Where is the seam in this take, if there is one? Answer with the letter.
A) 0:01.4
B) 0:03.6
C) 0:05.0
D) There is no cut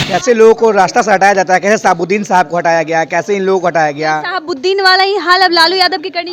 D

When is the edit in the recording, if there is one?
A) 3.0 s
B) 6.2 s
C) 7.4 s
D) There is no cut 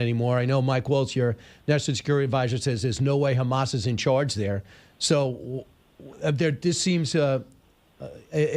A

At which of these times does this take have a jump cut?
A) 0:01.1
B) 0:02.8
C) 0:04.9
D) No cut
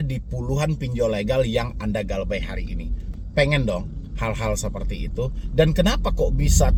D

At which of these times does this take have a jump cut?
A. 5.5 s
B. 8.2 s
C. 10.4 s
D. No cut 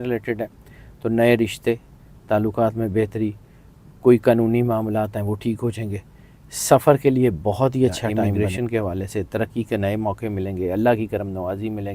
B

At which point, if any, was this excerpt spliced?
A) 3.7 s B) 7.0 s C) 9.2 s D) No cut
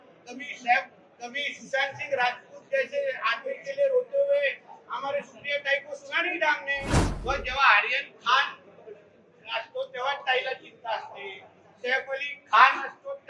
B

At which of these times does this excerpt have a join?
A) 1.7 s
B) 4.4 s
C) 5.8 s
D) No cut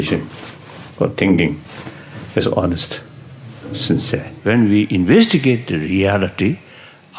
B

